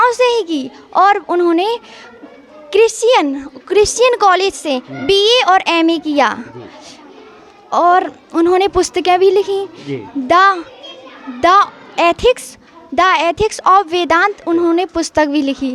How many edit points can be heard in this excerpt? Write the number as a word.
zero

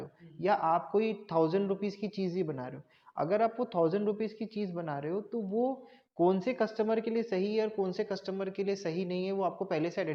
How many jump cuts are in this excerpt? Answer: zero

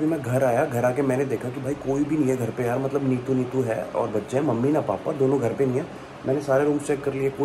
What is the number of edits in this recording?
zero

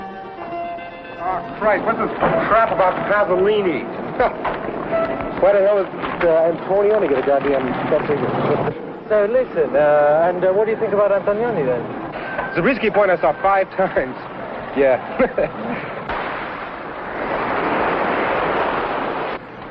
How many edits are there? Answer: one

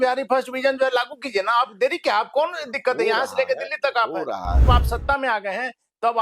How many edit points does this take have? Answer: one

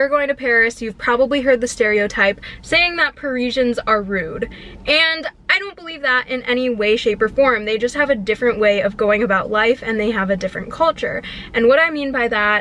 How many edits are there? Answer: zero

